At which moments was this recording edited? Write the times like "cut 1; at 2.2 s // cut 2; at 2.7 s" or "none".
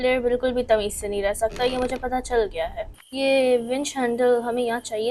none